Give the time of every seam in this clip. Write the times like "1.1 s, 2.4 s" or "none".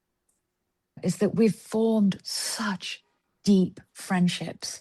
1.0 s